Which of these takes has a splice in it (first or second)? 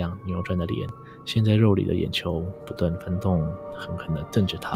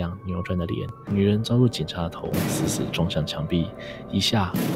second